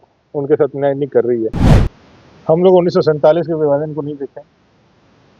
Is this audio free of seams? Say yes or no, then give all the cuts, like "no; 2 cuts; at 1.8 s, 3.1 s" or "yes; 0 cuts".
no; 1 cut; at 1.7 s